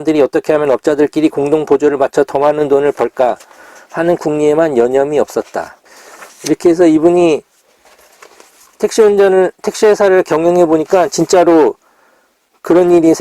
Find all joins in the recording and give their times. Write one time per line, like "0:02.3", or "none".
none